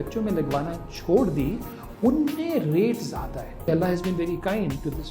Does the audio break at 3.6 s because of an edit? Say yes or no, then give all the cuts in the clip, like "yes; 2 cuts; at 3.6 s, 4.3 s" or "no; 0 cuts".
yes; 1 cut; at 3.6 s